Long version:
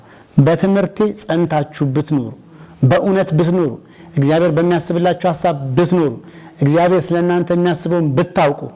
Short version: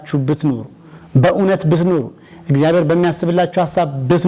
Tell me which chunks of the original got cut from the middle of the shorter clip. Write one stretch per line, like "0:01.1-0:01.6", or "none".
none

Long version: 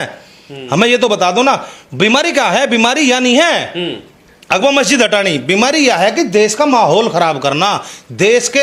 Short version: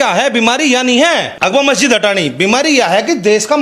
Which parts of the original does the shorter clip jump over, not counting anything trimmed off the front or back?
0:03.7-0:04.4

